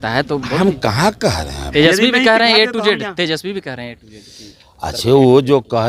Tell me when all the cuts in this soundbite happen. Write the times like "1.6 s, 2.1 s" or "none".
1.7 s